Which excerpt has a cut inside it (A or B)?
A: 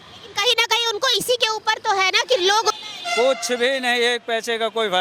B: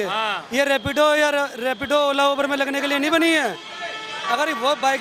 A